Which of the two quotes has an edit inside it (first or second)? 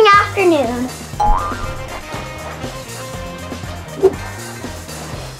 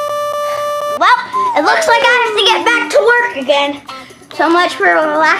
second